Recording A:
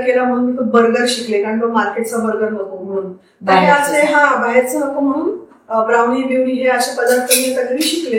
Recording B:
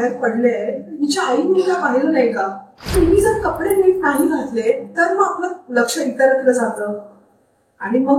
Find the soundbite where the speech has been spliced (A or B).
B